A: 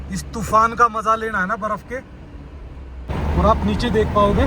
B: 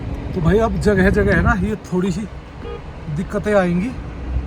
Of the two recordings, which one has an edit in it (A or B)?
A